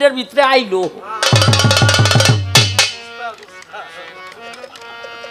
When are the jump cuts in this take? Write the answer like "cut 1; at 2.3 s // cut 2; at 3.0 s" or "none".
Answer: none